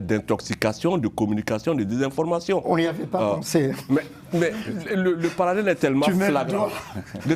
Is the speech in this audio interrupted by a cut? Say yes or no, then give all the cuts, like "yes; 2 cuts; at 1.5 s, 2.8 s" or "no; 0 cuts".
no; 0 cuts